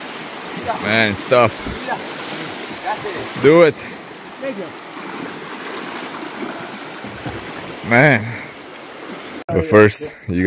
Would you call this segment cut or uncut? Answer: cut